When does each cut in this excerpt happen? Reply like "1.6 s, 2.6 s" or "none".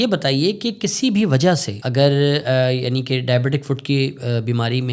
1.8 s